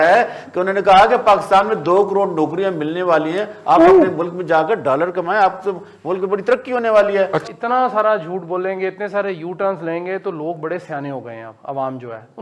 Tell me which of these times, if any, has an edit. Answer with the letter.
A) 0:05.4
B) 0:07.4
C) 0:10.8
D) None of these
B